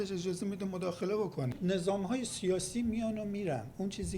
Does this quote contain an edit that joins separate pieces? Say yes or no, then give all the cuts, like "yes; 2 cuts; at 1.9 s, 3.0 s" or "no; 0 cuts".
yes; 1 cut; at 1.6 s